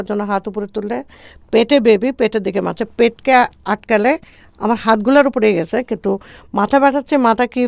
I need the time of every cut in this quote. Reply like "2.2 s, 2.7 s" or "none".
none